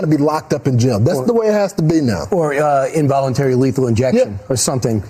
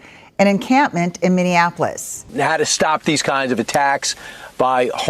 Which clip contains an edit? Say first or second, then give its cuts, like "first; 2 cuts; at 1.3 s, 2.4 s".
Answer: second; 1 cut; at 2.3 s